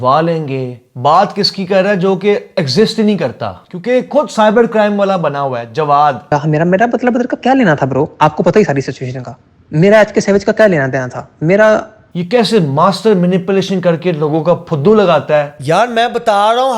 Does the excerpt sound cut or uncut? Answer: cut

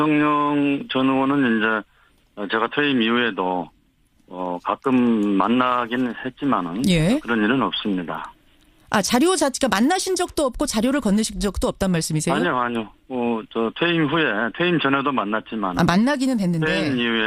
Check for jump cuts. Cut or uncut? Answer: cut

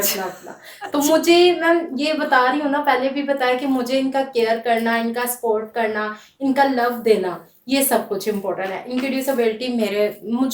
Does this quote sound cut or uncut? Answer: uncut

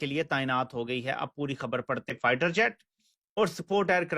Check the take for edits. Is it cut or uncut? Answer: cut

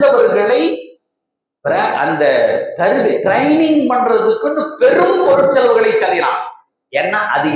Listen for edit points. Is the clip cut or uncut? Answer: uncut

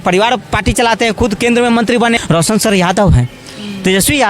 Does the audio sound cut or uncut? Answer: cut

